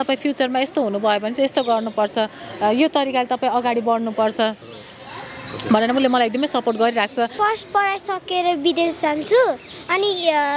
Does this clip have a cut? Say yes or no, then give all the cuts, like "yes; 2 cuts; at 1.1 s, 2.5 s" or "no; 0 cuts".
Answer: yes; 1 cut; at 7.3 s